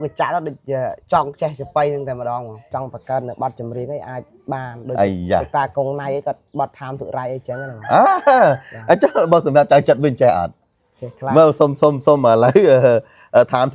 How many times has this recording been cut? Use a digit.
1